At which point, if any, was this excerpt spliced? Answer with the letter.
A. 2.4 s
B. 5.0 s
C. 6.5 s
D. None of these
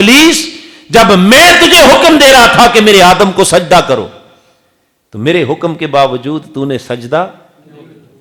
D